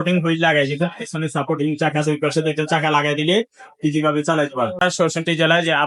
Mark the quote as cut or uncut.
cut